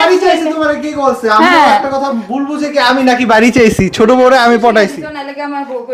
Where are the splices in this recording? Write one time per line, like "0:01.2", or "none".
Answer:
none